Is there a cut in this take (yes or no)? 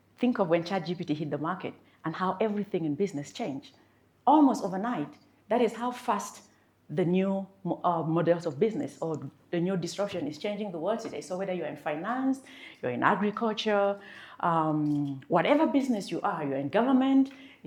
no